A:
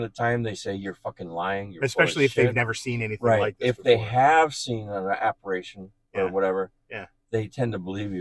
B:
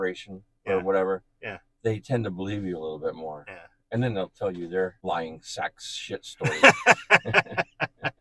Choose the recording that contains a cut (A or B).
B